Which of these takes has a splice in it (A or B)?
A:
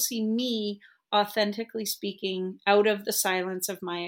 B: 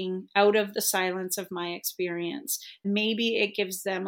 B